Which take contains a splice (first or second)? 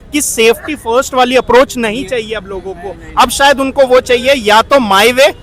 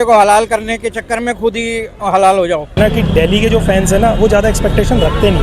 second